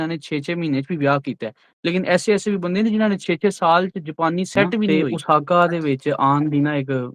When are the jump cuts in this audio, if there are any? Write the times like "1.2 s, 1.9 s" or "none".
4.9 s